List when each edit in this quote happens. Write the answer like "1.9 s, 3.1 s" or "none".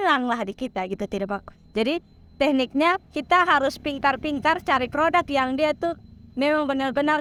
none